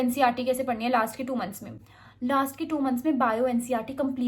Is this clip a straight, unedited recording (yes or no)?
yes